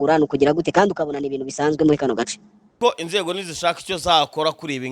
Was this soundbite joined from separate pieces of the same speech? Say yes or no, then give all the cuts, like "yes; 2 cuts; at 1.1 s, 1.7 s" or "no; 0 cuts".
yes; 1 cut; at 2.7 s